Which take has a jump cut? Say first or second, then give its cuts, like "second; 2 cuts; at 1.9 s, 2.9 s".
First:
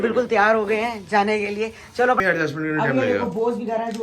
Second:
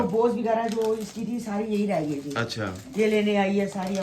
first; 1 cut; at 2.2 s